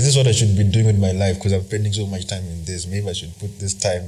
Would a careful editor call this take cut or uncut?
uncut